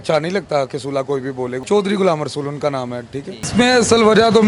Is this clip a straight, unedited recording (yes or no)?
no